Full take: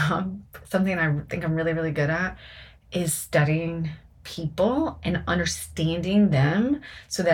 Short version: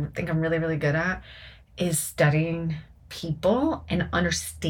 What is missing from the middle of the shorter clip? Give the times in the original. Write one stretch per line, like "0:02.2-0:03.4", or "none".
none